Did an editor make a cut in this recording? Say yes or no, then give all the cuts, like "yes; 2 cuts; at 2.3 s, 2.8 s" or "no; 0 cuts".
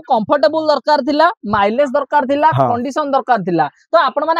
no; 0 cuts